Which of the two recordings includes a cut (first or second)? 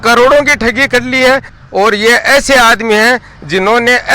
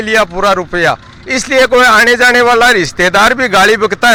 first